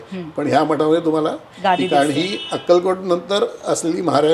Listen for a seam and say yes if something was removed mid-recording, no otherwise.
no